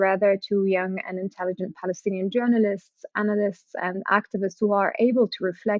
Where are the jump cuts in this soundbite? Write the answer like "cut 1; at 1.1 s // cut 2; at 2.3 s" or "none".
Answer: none